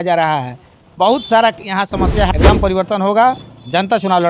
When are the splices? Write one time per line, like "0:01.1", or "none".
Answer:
0:02.3

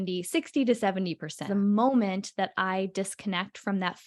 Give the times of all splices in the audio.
0:01.4

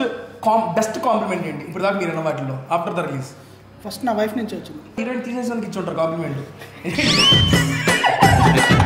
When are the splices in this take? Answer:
0:05.0

